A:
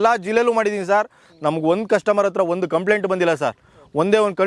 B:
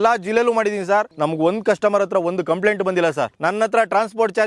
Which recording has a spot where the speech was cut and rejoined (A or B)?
B